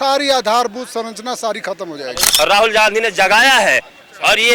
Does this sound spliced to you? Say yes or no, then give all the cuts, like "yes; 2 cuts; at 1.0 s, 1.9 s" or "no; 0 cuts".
yes; 1 cut; at 2.2 s